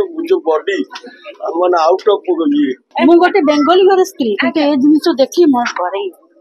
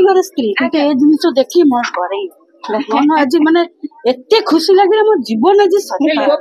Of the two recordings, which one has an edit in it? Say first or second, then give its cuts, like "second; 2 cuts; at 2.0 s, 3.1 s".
first; 1 cut; at 2.9 s